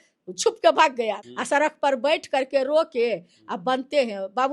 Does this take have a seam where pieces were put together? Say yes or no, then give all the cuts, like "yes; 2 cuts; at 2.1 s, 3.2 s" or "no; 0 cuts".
yes; 1 cut; at 1.2 s